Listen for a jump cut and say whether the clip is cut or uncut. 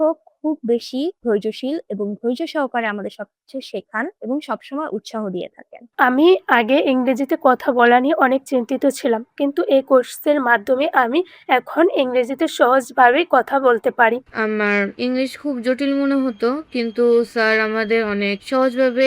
cut